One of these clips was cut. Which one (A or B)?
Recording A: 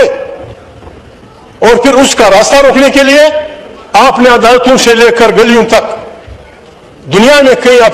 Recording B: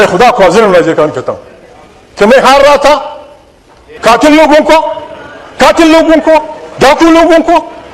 B